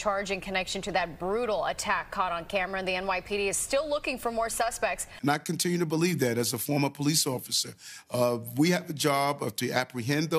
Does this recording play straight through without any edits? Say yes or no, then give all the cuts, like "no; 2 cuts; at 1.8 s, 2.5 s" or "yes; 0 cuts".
no; 1 cut; at 5.1 s